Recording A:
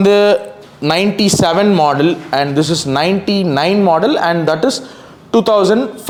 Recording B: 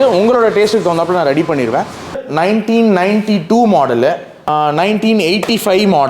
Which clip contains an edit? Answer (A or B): B